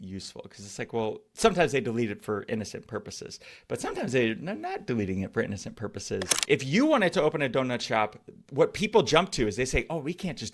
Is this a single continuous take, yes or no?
no